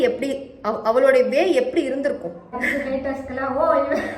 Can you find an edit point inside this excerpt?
yes; 1 cut; at 2.5 s

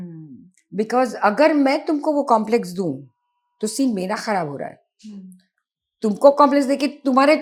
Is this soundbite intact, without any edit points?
yes; 0 cuts

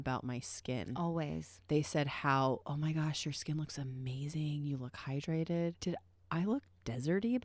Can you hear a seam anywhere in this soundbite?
yes; 1 cut; at 5.8 s

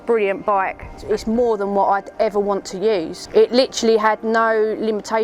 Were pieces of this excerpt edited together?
yes; 2 cuts; at 0.9 s, 3.2 s

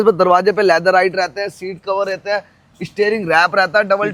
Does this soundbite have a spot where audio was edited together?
no; 0 cuts

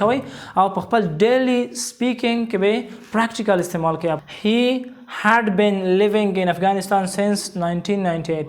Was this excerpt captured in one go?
no; 1 cut; at 4.2 s

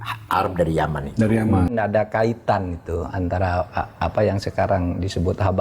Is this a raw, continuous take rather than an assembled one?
no; 1 cut; at 1.7 s

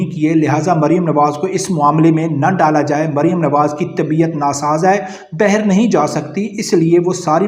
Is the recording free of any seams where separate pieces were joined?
yes; 0 cuts

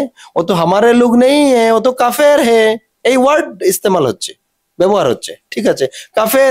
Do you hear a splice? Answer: no; 0 cuts

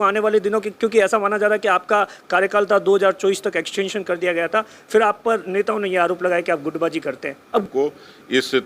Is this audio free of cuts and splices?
no; 1 cut; at 7.6 s

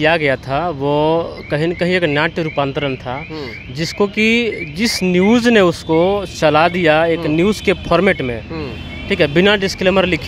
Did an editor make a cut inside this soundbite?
no; 0 cuts

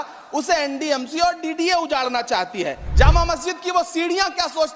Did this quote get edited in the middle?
yes; 1 cut; at 2.8 s

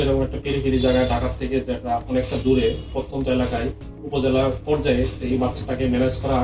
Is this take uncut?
yes; 0 cuts

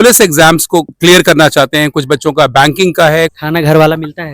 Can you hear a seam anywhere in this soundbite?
yes; 2 cuts; at 0.9 s, 3.4 s

